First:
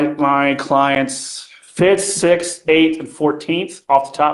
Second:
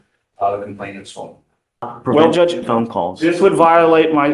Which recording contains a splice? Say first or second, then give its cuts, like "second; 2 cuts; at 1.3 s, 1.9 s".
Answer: second; 1 cut; at 1.9 s